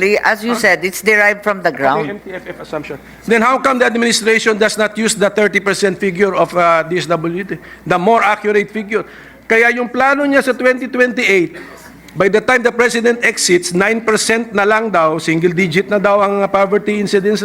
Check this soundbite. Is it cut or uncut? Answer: uncut